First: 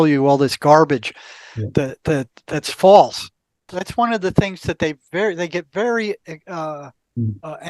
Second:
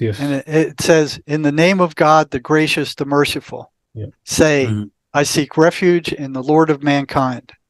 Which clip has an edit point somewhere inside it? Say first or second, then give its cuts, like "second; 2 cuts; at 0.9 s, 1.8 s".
first; 1 cut; at 3.7 s